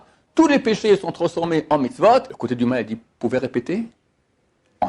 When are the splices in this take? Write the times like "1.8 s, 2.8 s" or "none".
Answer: 2.3 s